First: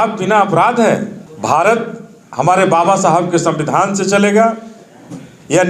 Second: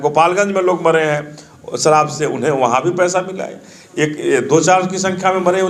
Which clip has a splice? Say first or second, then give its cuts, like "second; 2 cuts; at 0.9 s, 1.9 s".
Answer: first; 1 cut; at 1.2 s